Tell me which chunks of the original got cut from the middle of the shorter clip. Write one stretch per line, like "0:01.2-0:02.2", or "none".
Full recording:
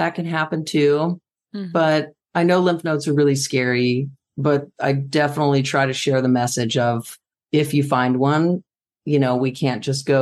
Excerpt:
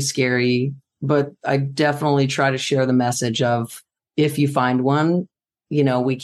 none